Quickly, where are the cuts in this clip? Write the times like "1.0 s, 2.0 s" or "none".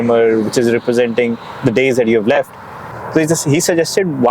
3.0 s